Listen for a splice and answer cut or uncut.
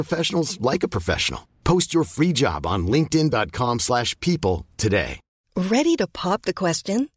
cut